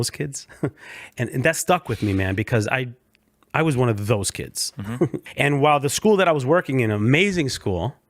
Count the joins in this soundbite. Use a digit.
1